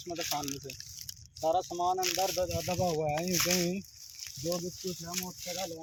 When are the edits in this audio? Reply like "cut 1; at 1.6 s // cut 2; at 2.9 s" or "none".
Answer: none

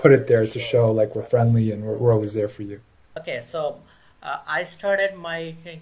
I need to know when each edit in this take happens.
cut 1; at 3.0 s

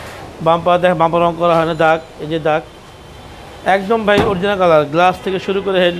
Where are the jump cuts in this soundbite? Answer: none

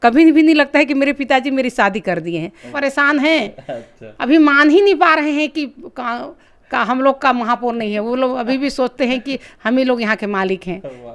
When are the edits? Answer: cut 1; at 2.7 s

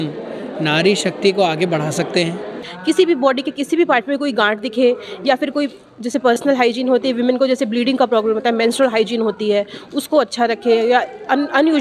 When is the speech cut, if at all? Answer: cut 1; at 2.7 s

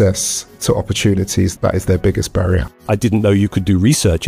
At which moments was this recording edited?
cut 1; at 1.5 s // cut 2; at 2.8 s

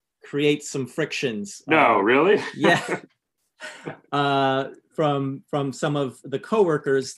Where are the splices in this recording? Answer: none

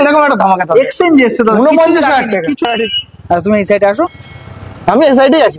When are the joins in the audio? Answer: cut 1; at 2.6 s

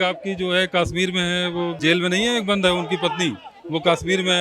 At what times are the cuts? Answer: cut 1; at 1.8 s

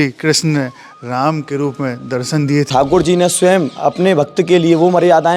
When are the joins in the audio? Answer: cut 1; at 2.7 s

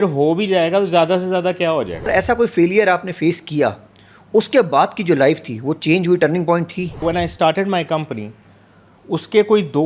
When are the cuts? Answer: cut 1; at 2.1 s // cut 2; at 7.0 s

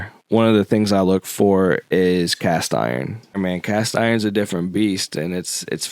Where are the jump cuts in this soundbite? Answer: cut 1; at 3.4 s

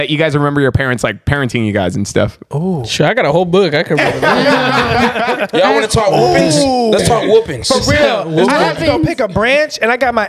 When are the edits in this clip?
none

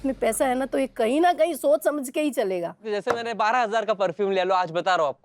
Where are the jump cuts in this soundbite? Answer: cut 1; at 2.8 s

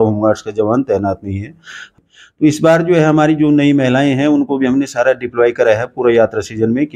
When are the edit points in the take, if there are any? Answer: cut 1; at 1.8 s

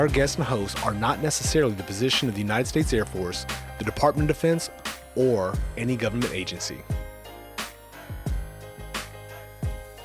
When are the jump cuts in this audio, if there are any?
cut 1; at 6.7 s

